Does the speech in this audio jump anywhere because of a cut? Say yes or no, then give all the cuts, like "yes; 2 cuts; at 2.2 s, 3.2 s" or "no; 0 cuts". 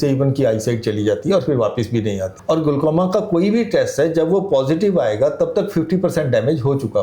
yes; 1 cut; at 2.3 s